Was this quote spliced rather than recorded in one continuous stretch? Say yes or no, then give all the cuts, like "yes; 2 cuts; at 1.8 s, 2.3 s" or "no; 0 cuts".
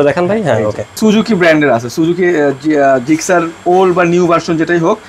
yes; 1 cut; at 1.0 s